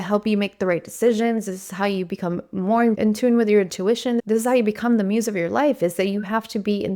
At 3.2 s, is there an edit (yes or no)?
no